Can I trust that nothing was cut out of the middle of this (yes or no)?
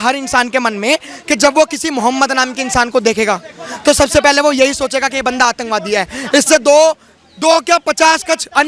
yes